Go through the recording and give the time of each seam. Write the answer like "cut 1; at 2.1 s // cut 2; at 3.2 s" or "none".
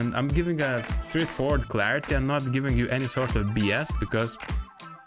none